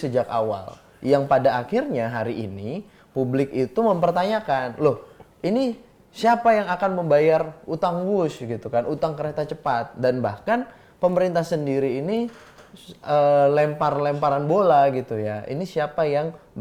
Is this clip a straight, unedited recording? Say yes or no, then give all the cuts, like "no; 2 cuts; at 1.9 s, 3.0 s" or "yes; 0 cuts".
yes; 0 cuts